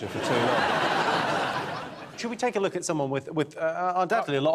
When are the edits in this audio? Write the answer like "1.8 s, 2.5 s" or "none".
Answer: none